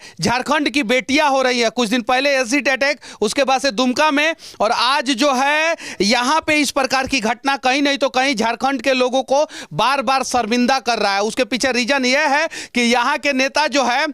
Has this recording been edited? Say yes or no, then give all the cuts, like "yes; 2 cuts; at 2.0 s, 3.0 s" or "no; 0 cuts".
no; 0 cuts